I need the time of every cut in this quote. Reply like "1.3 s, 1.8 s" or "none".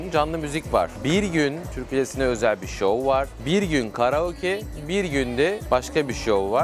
0.9 s, 1.7 s, 5.6 s

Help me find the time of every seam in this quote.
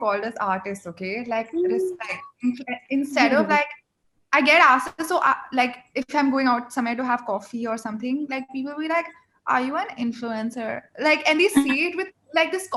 none

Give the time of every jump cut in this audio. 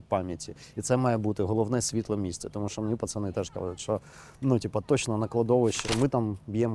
5.8 s

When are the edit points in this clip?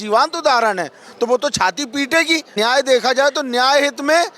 2.5 s

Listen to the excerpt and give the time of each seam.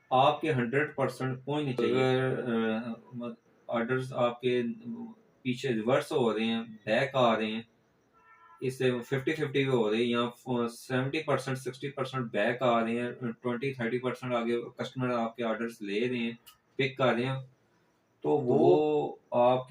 1.8 s, 18.8 s

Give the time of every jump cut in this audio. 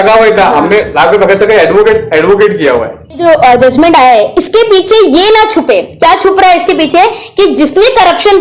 3.2 s

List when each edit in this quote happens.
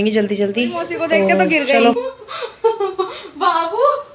1.9 s

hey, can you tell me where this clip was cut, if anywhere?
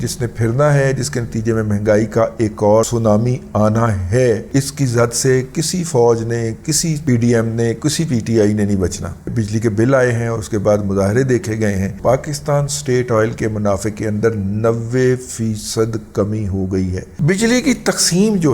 2.9 s, 4.4 s, 9.2 s, 12.0 s, 17.1 s

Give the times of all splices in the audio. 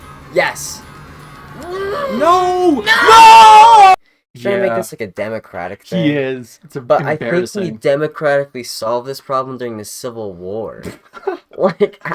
3.9 s

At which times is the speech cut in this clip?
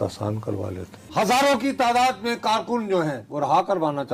1.0 s, 3.2 s

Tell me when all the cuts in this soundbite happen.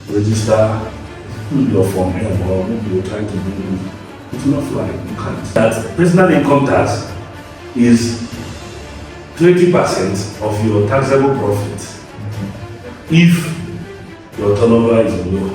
5.5 s

